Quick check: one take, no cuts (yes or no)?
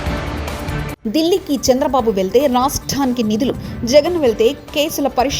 no